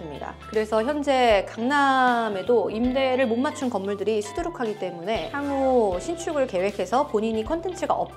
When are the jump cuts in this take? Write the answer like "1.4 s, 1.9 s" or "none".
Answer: none